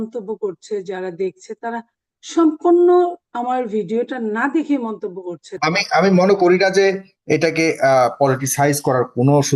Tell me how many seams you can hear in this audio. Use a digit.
1